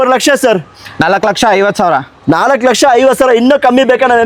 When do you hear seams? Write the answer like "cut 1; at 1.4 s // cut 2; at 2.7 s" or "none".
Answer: none